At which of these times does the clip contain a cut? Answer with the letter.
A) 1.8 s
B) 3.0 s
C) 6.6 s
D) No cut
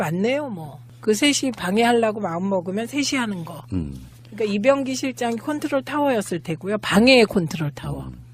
C